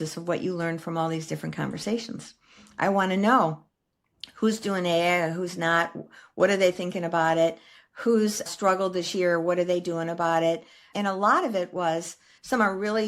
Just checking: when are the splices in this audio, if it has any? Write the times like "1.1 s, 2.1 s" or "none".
10.8 s